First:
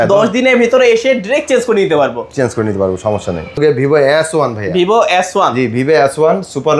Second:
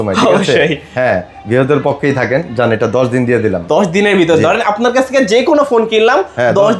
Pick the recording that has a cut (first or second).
first